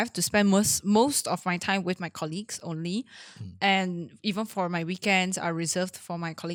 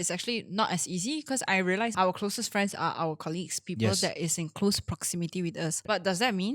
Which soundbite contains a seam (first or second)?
second